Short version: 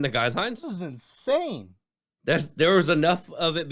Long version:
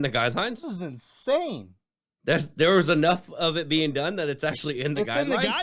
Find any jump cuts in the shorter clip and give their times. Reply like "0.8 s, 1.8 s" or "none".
none